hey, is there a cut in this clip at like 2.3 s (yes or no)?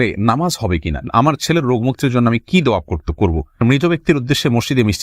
no